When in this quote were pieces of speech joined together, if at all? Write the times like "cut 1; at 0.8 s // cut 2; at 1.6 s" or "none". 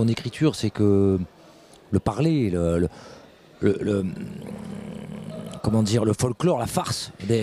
none